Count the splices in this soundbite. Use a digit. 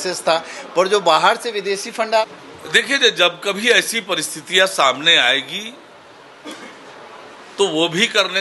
1